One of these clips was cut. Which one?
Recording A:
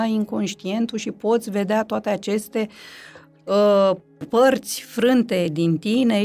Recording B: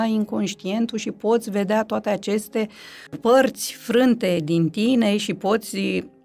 B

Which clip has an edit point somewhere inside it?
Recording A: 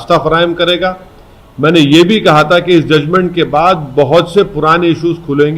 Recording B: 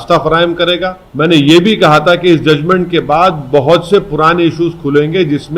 B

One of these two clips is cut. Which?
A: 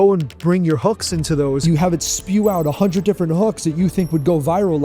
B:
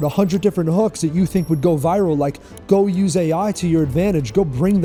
A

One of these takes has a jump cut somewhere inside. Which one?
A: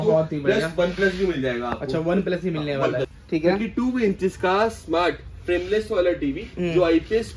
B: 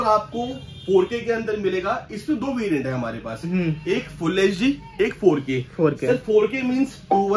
A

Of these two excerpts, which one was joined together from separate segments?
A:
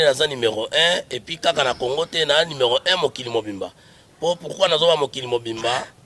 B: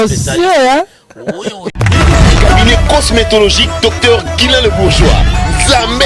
B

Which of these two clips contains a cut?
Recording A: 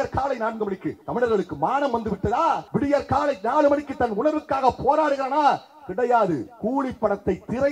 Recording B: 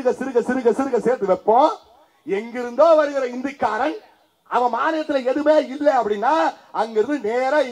A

